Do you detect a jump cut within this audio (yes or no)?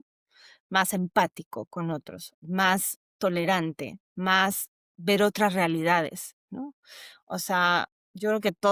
no